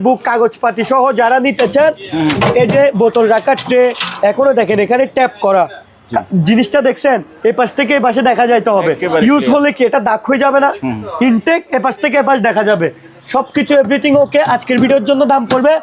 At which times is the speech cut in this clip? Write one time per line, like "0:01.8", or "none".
none